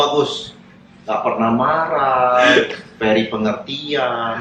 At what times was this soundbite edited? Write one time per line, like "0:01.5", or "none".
none